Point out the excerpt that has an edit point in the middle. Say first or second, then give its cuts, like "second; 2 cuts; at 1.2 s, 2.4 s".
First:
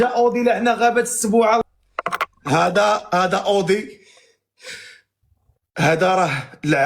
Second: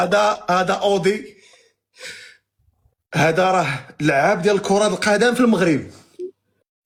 first; 1 cut; at 1.6 s